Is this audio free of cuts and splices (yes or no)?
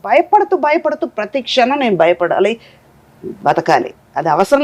yes